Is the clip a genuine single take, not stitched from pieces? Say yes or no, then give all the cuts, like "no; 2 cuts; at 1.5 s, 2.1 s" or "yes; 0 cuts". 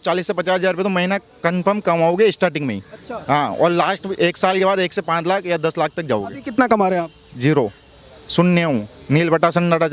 yes; 0 cuts